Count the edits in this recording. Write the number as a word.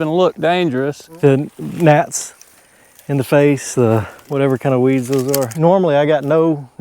three